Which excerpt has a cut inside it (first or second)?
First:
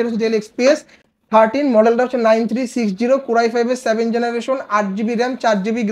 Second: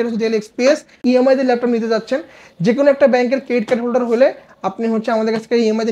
second